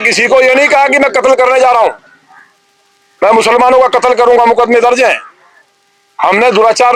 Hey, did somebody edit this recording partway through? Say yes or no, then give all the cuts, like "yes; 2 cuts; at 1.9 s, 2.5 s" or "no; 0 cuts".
no; 0 cuts